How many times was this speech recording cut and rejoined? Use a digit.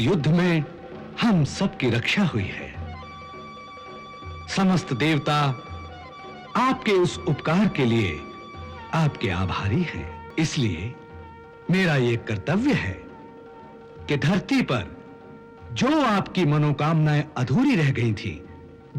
1